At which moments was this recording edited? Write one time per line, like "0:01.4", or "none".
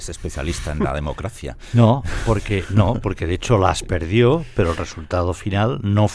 none